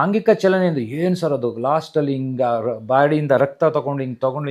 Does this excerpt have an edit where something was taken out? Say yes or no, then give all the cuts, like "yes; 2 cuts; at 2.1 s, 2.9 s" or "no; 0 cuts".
no; 0 cuts